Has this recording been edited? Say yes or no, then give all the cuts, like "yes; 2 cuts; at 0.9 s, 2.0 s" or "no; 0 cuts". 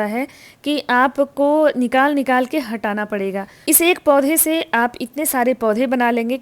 no; 0 cuts